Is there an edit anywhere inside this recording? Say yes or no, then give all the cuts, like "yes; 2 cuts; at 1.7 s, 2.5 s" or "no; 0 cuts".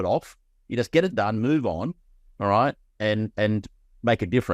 no; 0 cuts